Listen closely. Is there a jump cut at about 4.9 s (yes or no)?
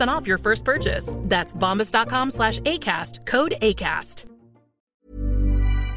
yes